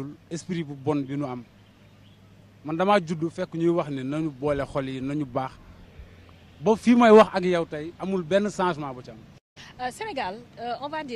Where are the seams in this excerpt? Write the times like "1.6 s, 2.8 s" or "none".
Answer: 4.3 s